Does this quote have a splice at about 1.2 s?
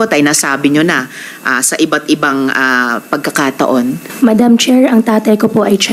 no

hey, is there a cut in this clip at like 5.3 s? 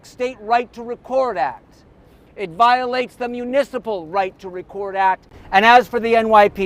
yes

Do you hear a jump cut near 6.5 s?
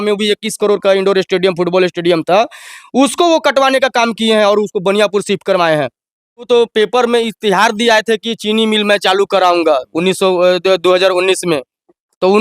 yes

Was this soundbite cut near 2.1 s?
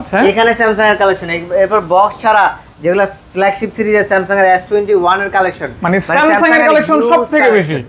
no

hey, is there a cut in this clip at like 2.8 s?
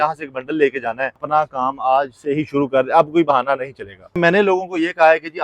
no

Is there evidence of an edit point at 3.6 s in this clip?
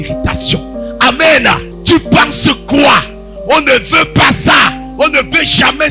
no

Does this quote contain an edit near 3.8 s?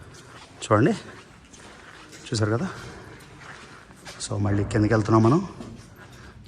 yes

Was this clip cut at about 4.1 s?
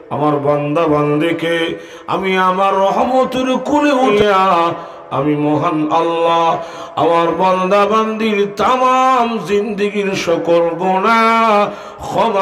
yes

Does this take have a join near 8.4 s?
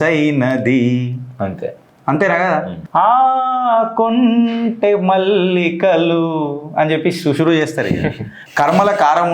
yes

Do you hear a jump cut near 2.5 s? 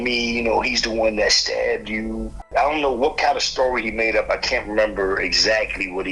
yes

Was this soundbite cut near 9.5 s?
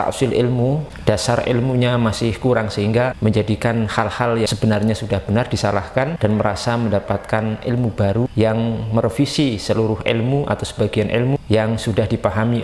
no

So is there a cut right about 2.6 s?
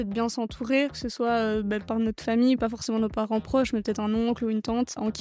yes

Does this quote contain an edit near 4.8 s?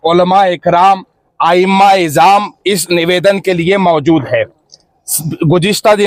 no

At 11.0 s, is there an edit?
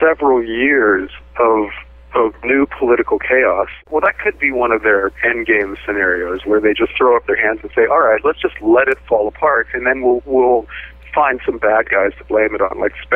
no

